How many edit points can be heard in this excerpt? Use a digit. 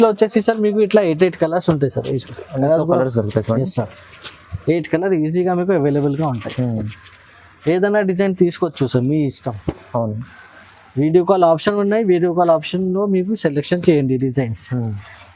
0